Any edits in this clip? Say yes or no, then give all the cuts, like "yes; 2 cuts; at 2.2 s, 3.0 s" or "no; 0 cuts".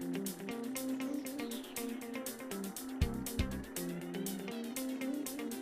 yes; 1 cut; at 4.7 s